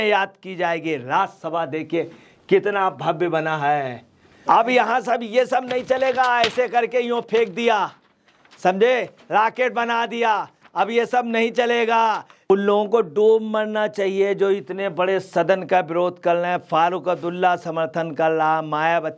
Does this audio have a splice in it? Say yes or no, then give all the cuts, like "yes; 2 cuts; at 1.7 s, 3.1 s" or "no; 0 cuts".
yes; 2 cuts; at 4.4 s, 12.5 s